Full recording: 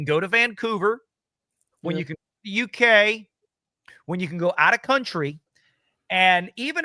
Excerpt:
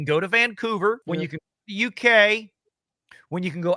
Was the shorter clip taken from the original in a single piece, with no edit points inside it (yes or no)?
no